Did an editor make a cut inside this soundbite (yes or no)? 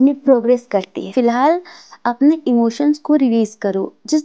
yes